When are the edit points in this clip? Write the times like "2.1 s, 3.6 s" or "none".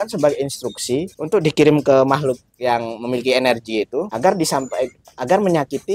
1.1 s, 4.1 s